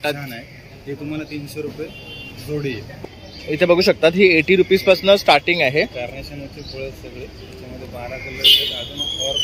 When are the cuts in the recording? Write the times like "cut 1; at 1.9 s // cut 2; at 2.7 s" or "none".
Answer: cut 1; at 2.9 s

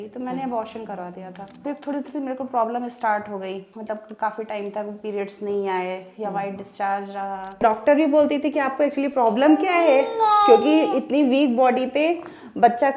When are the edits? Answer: cut 1; at 1.6 s // cut 2; at 3.7 s // cut 3; at 7.6 s

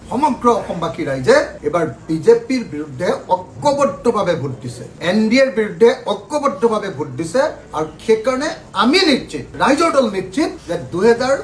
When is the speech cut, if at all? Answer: none

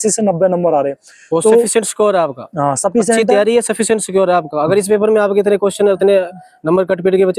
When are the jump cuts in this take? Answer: none

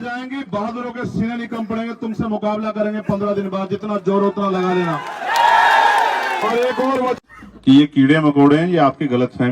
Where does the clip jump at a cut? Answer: cut 1; at 7.2 s

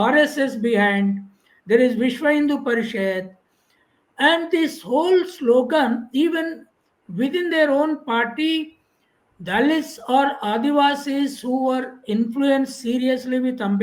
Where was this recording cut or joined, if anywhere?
none

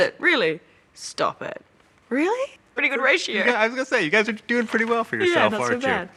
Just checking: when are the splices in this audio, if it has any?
none

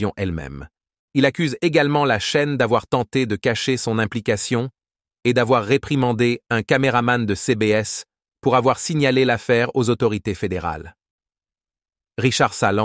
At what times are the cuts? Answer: cut 1; at 2.2 s

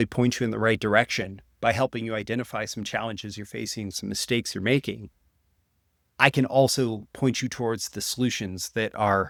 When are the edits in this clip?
none

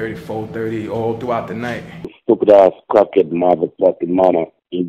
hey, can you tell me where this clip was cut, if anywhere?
cut 1; at 2.2 s

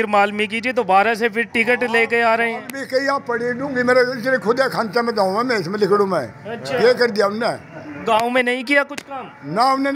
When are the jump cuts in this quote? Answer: none

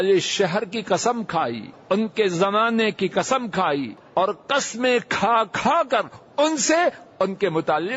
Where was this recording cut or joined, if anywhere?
cut 1; at 1.7 s // cut 2; at 4.0 s

